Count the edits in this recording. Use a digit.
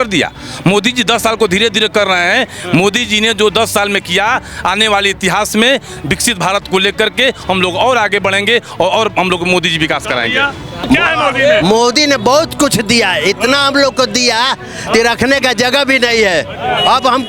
1